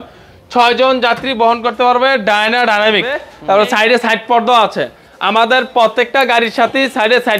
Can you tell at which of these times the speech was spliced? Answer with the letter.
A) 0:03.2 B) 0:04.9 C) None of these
A